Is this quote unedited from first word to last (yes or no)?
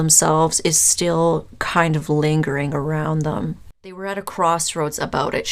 no